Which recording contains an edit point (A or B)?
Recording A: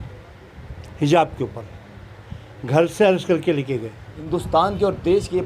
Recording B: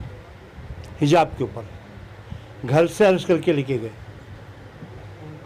A